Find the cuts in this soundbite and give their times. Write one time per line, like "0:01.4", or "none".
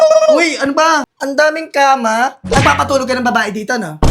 0:01.2
0:02.4